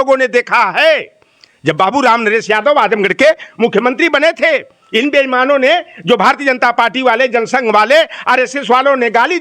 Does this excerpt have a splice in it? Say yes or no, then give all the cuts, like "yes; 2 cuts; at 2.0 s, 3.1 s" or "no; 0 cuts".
no; 0 cuts